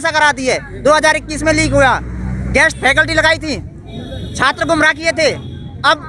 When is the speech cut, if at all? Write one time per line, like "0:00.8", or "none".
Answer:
none